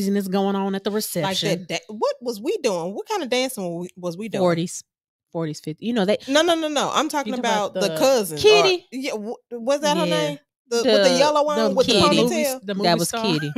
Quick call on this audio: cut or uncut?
uncut